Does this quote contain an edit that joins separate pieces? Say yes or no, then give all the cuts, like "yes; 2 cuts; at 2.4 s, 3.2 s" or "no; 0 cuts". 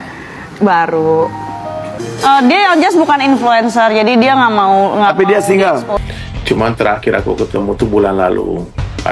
yes; 1 cut; at 6.0 s